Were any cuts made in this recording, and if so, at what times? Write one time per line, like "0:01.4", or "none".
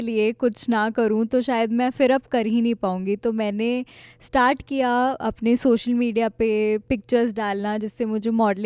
none